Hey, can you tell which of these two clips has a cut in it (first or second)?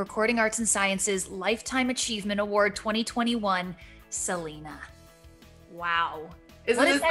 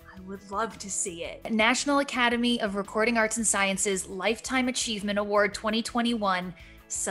second